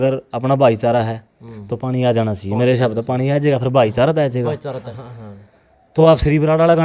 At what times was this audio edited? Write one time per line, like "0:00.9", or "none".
0:04.8